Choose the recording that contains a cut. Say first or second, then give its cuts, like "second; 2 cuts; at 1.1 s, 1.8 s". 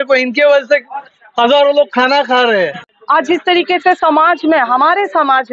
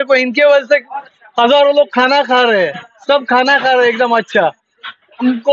first; 1 cut; at 2.9 s